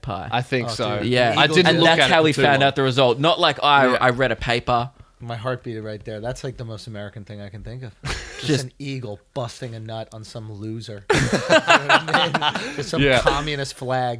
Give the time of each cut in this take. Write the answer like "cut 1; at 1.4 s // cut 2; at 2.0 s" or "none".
none